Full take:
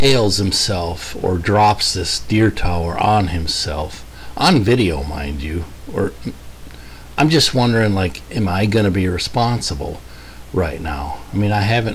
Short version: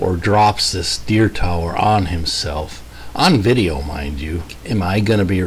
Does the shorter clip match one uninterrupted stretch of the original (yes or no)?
no